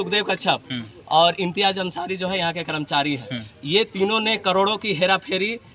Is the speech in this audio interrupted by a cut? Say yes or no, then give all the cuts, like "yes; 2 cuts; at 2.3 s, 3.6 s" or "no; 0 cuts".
no; 0 cuts